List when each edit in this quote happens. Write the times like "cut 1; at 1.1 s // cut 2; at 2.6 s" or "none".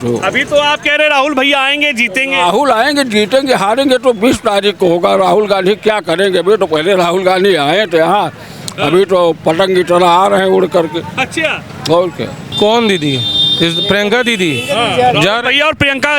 cut 1; at 12.4 s